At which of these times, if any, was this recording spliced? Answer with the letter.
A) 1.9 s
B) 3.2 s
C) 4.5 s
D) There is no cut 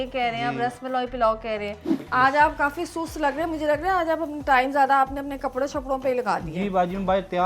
A